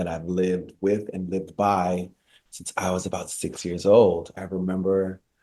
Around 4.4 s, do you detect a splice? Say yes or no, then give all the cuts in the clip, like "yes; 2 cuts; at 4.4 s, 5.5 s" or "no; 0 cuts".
yes; 1 cut; at 4.4 s